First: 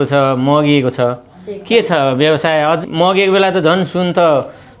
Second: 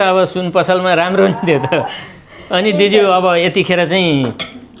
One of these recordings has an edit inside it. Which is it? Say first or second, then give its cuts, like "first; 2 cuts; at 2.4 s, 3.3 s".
first; 1 cut; at 2.8 s